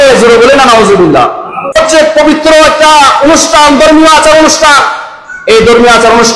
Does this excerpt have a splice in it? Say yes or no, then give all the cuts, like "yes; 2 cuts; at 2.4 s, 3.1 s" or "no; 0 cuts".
yes; 1 cut; at 1.8 s